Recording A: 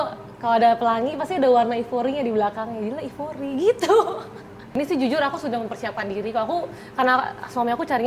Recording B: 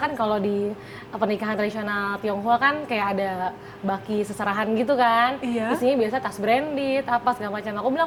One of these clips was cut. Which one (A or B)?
A